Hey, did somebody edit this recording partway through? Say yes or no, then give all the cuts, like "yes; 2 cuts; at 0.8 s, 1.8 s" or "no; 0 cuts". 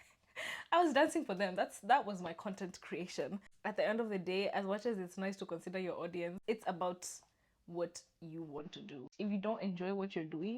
yes; 3 cuts; at 3.5 s, 6.4 s, 9.0 s